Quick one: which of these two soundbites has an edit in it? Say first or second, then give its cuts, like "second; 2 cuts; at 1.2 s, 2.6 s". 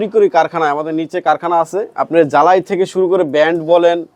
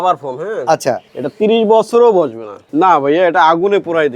second; 2 cuts; at 1.1 s, 2.7 s